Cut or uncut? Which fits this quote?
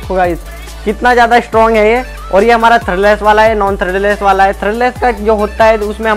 uncut